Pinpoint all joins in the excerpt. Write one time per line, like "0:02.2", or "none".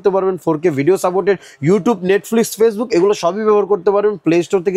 none